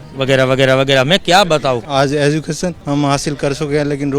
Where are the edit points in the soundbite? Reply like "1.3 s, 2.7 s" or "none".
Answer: 1.8 s, 2.8 s